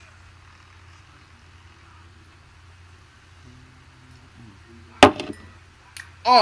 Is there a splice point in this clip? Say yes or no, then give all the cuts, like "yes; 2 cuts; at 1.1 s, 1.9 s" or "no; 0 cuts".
no; 0 cuts